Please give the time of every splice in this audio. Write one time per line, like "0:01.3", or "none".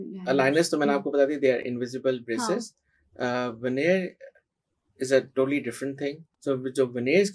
0:06.3

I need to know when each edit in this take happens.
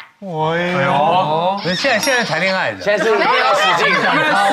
none

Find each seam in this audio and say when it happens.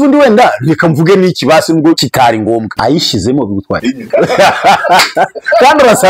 0:02.2
0:04.0

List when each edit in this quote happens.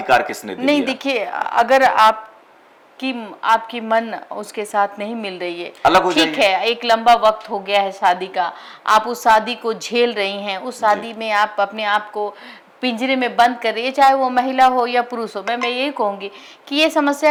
none

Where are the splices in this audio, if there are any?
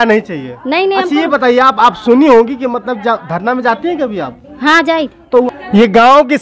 none

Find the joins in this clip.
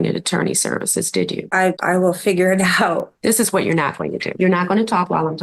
0:01.6
0:03.1
0:04.3

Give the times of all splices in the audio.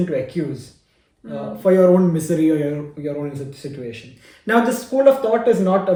none

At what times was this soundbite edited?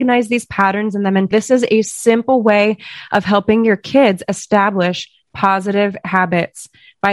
0:01.3

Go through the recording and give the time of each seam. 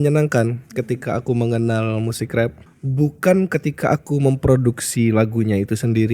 0:02.6

